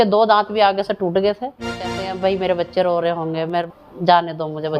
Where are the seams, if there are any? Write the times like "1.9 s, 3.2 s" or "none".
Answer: 2.0 s, 3.7 s